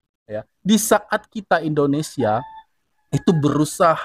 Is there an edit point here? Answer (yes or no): no